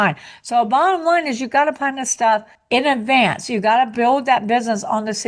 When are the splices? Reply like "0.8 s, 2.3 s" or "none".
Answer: 3.9 s